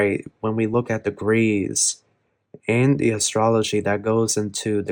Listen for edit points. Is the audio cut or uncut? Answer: uncut